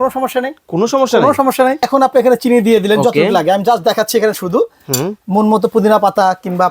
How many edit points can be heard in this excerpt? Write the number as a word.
one